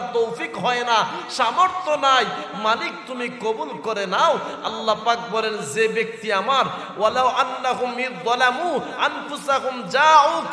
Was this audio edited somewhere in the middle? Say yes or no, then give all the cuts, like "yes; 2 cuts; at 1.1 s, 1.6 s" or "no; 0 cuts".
no; 0 cuts